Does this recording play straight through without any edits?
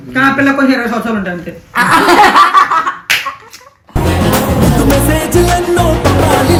yes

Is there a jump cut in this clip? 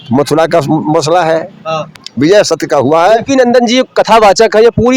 yes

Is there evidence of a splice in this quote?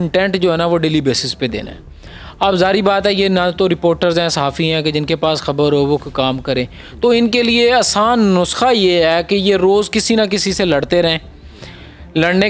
no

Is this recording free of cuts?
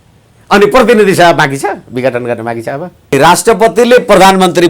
no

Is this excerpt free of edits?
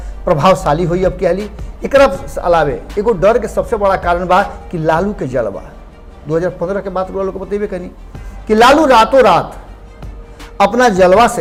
yes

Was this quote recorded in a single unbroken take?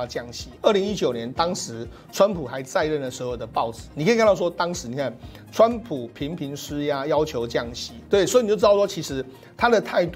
yes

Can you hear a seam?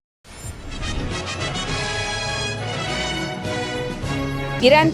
no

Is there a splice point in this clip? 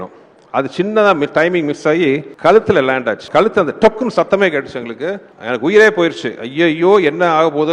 yes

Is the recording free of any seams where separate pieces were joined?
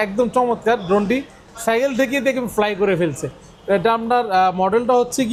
yes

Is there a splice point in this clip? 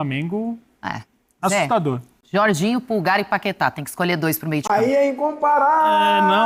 no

